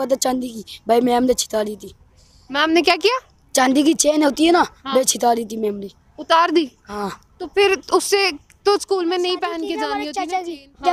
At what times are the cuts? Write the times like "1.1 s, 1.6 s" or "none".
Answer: 9.8 s